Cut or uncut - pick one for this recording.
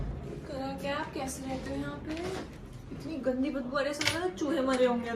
uncut